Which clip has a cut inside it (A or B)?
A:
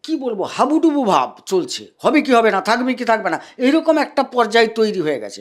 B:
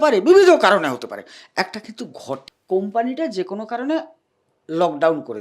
B